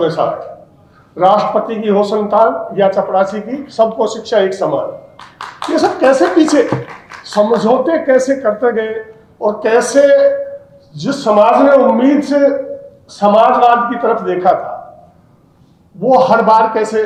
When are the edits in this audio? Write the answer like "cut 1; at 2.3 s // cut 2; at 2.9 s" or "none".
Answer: none